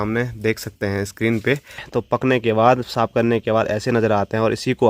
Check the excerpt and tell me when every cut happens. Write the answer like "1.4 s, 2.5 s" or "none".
1.8 s

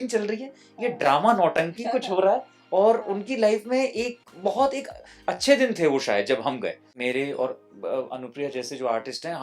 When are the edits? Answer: 6.9 s

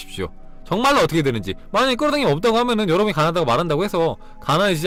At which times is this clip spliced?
none

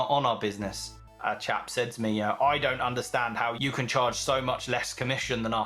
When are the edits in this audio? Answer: 1.1 s, 3.6 s

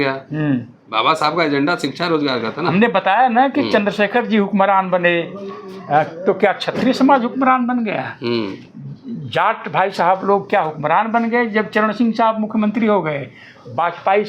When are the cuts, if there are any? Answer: none

